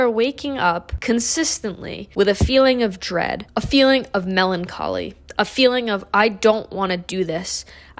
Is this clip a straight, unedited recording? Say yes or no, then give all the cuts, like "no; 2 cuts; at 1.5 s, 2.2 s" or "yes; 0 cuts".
no; 1 cut; at 0.9 s